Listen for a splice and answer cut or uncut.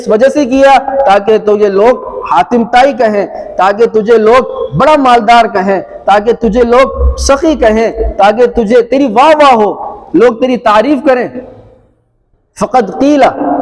uncut